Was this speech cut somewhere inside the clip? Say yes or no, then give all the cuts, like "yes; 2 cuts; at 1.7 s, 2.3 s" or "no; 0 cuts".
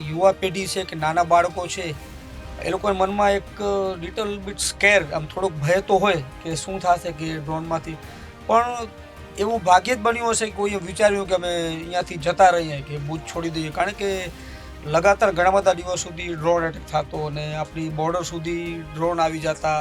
no; 0 cuts